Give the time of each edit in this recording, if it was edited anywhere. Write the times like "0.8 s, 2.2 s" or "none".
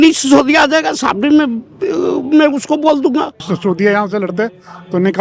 3.5 s